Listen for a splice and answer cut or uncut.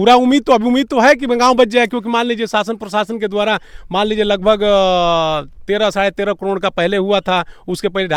uncut